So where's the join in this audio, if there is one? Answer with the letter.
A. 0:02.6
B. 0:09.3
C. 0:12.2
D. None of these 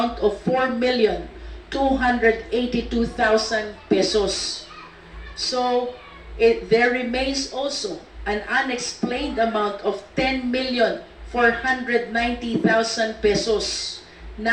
D